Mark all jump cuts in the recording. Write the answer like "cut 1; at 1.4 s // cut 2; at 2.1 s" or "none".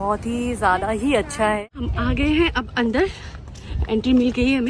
cut 1; at 1.6 s